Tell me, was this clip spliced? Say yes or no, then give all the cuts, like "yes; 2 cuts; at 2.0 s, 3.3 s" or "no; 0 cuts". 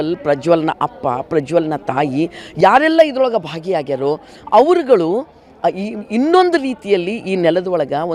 no; 0 cuts